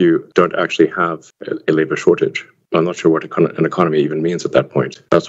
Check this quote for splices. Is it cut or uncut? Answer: uncut